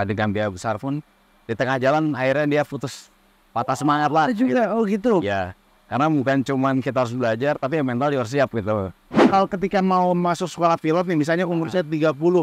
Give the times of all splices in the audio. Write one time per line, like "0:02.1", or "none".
0:09.1